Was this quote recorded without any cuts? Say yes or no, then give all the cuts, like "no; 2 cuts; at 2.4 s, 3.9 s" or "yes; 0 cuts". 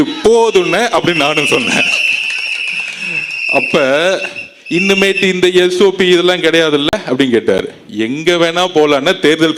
yes; 0 cuts